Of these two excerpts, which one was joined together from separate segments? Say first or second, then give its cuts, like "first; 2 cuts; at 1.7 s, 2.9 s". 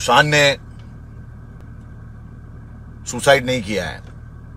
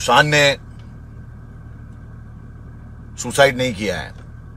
first; 1 cut; at 1.6 s